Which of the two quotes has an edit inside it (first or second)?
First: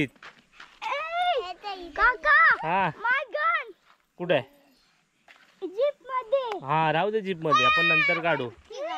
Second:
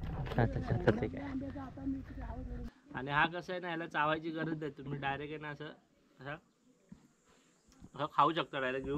second